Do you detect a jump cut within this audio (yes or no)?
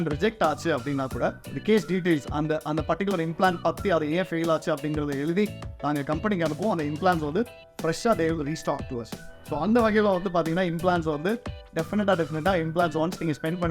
yes